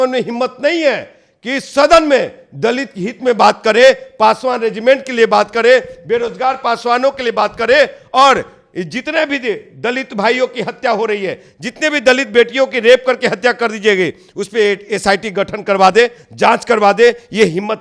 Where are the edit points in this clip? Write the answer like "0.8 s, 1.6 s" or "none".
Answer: none